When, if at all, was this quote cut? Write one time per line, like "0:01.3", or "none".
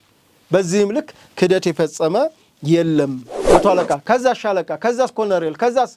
0:03.3